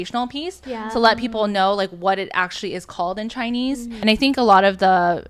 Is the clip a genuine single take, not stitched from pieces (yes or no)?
no